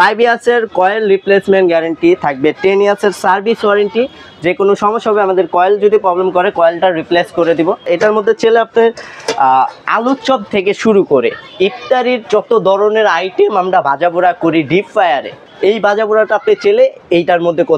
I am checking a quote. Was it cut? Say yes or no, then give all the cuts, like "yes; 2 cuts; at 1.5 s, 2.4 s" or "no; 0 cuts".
yes; 2 cuts; at 7.9 s, 15.4 s